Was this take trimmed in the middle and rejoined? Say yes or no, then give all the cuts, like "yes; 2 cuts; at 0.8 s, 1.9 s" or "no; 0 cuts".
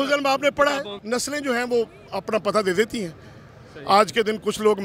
yes; 1 cut; at 0.9 s